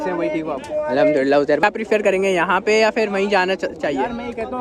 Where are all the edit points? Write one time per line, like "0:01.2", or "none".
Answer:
0:01.6